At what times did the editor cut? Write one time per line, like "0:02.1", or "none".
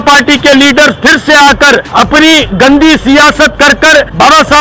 0:01.9